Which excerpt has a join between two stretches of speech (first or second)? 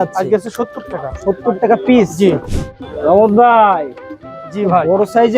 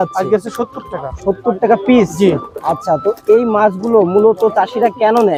first